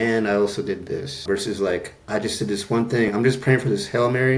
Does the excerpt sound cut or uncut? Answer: cut